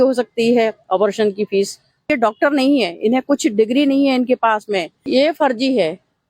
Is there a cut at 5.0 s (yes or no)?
yes